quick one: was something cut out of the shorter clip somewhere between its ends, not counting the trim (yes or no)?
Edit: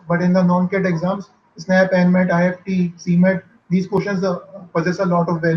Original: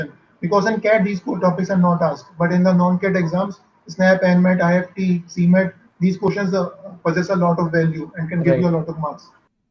no